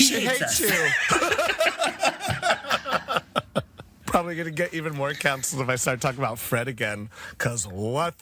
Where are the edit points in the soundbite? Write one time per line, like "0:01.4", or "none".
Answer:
0:04.0

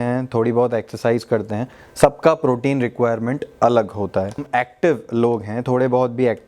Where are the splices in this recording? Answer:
0:04.4

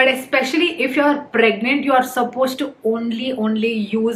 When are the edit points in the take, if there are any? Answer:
none

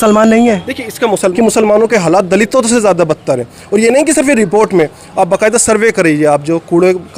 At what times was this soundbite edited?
0:01.2

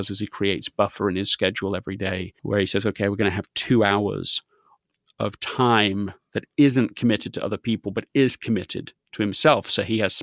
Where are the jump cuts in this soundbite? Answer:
0:02.4

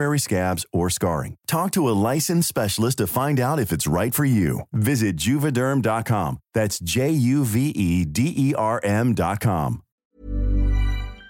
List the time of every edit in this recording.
0:10.0

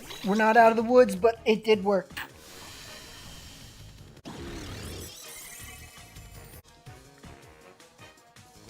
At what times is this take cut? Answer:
0:04.2
0:06.6

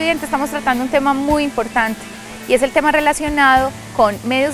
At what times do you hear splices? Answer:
none

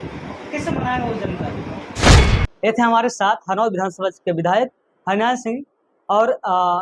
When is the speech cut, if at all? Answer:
0:02.3

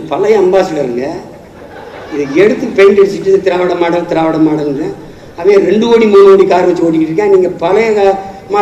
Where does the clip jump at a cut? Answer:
none

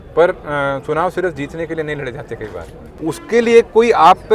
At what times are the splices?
0:02.8

